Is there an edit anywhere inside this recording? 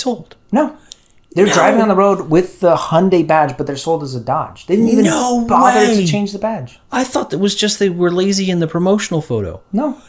no; 0 cuts

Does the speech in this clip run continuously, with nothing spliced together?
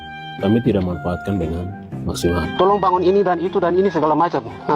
no; 1 cut; at 2.5 s

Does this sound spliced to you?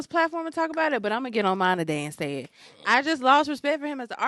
no; 0 cuts

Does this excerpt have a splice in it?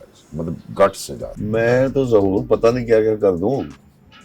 yes; 1 cut; at 1.3 s

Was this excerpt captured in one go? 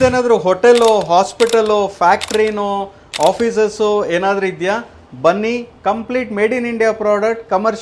yes; 0 cuts

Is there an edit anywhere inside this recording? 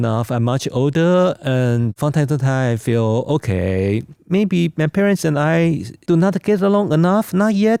no; 0 cuts

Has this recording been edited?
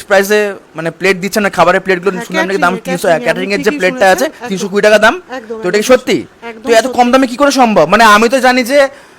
no; 0 cuts

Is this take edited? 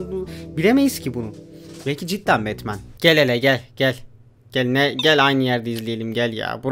yes; 1 cut; at 2.9 s

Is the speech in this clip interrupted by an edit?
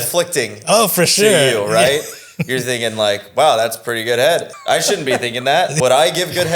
yes; 2 cuts; at 4.5 s, 5.7 s

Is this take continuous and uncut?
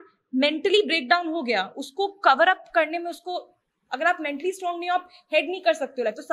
yes; 0 cuts

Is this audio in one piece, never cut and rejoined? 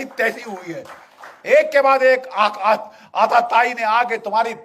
yes; 0 cuts

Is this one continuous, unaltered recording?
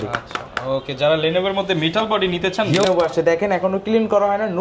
no; 1 cut; at 2.8 s

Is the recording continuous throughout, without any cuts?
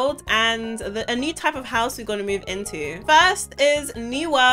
yes; 0 cuts

